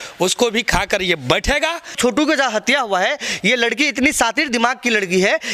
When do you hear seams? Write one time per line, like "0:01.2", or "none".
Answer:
0:02.0